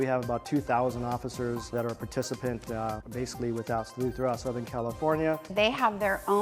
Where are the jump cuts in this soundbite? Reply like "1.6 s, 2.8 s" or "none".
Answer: 1.7 s, 3.0 s, 5.5 s